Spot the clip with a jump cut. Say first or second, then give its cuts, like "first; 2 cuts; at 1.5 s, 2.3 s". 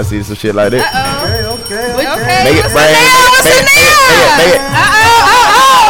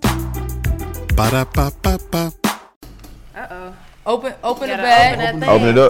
second; 1 cut; at 2.7 s